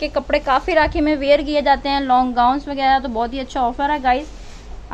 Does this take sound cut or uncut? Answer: uncut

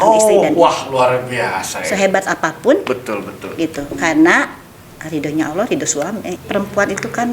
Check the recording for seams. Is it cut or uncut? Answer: cut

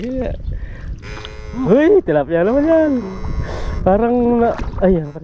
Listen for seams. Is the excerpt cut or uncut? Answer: uncut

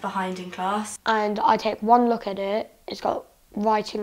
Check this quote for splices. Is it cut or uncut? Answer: cut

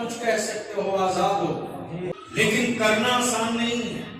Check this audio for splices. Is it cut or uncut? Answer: cut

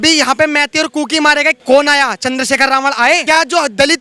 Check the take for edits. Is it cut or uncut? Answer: cut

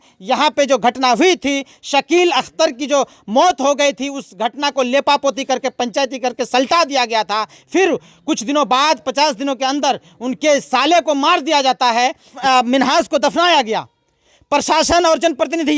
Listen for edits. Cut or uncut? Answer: cut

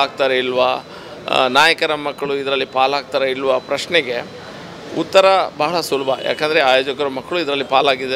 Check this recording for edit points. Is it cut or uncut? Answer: uncut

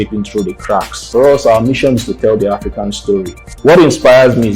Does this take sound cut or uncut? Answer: cut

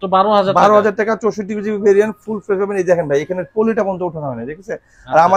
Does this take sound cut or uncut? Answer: uncut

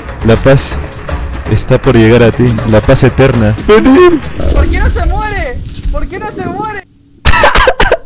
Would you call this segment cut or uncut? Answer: cut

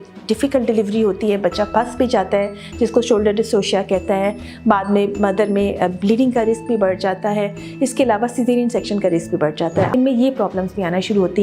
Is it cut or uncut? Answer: cut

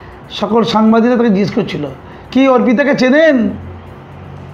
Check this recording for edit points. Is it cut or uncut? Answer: uncut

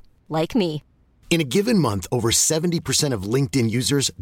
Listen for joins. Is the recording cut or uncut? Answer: uncut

